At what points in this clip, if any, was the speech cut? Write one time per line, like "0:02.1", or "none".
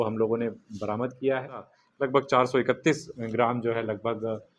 0:01.8